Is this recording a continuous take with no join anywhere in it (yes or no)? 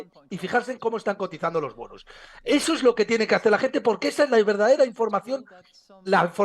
yes